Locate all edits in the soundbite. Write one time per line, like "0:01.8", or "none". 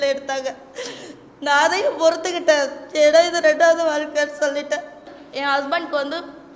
0:05.2

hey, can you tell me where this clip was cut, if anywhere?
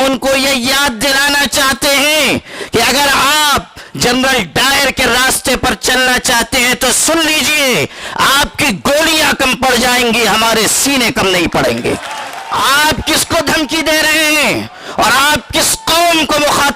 0:12.4

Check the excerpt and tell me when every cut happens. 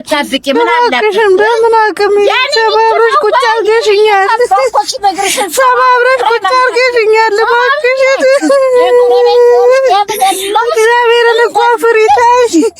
none

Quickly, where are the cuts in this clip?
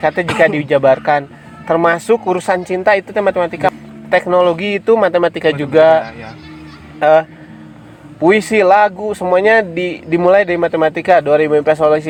none

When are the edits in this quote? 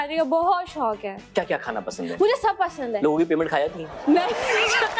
none

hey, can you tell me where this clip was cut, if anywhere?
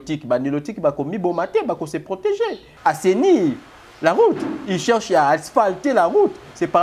0:02.7

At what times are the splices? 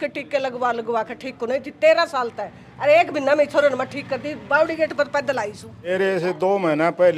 0:05.9

